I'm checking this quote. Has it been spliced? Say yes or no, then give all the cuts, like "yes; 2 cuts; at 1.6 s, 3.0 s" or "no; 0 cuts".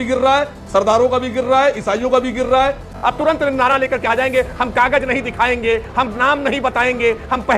yes; 1 cut; at 2.9 s